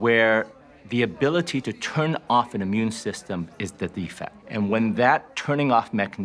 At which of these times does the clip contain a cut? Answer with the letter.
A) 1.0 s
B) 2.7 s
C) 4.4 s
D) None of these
C